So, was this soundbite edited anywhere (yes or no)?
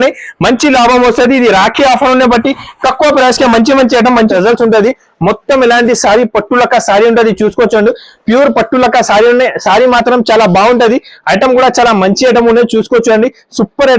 yes